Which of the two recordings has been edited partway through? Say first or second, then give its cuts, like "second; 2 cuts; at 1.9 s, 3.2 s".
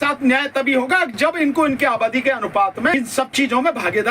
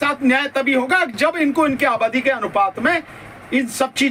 first; 1 cut; at 2.9 s